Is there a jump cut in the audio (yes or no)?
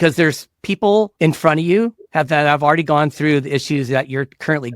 yes